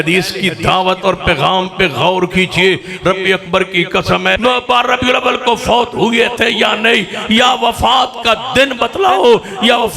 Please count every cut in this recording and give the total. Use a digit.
1